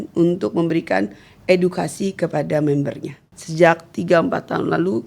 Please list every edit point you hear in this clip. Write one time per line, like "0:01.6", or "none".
0:03.3